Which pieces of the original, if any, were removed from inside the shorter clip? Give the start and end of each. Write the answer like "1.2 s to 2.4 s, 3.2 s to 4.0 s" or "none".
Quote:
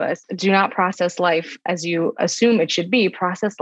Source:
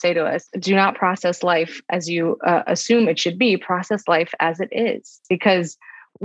2.4 s to 2.6 s

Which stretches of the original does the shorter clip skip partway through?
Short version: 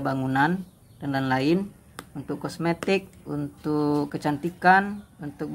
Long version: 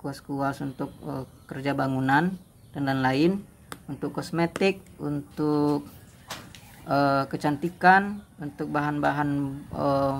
5.9 s to 7.3 s

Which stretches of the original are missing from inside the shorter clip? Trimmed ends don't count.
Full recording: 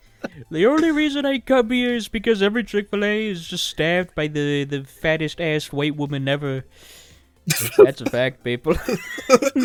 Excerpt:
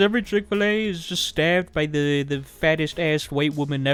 none

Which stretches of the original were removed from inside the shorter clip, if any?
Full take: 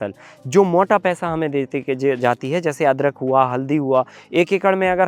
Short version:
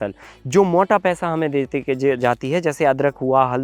none

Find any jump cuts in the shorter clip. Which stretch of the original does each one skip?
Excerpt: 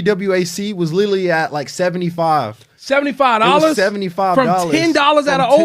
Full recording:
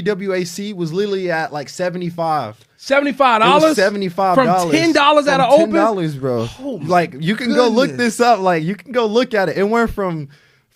none

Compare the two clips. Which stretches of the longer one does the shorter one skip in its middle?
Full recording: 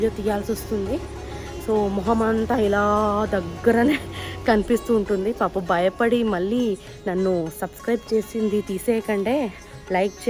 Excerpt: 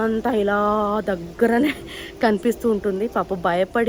none

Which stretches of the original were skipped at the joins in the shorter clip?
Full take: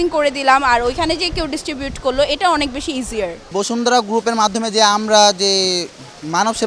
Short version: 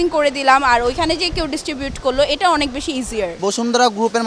3.3 s to 3.5 s

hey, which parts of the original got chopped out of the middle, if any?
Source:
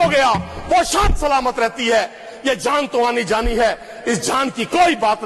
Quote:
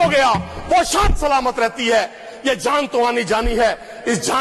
none

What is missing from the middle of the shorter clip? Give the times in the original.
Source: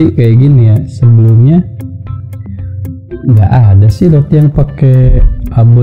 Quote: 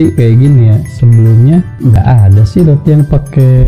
2.0 s to 3.4 s

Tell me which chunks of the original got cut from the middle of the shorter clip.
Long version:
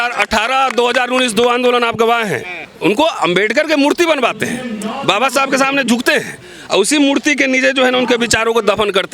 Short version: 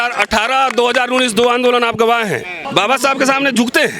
2.6 s to 4.9 s

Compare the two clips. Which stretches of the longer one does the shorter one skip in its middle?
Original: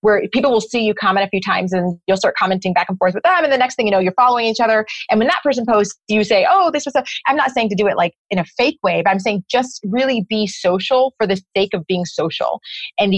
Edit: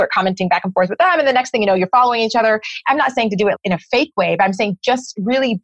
5.0 s to 7.1 s, 8.0 s to 8.2 s

